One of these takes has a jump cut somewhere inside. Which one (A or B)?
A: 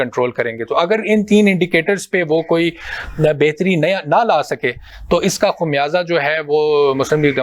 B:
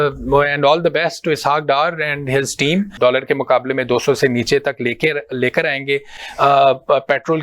B